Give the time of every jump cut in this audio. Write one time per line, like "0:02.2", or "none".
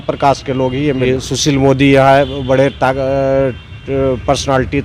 0:01.1